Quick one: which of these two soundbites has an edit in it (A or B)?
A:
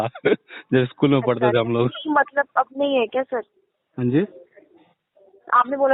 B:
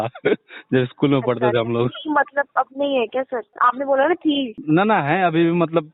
B